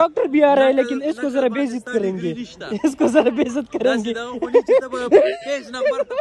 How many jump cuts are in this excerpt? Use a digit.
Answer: 0